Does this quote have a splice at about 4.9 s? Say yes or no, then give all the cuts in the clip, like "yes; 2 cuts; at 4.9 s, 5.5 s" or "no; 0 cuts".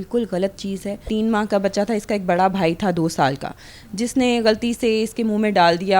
no; 1 cut; at 1.1 s